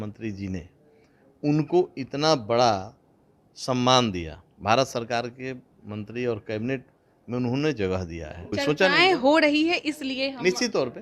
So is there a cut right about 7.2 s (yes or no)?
no